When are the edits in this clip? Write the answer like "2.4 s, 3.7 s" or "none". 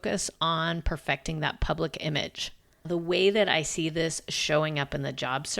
2.8 s